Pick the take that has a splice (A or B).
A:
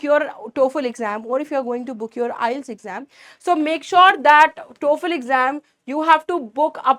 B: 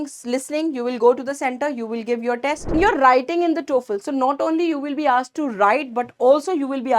B